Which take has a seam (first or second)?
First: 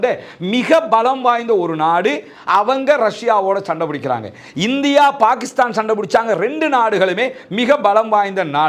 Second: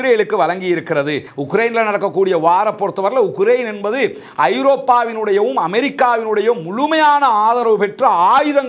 second